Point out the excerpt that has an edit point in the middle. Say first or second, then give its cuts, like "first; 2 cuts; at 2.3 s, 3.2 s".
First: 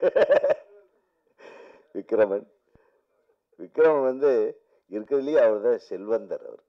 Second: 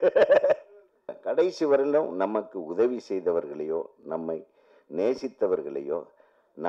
second; 1 cut; at 1.1 s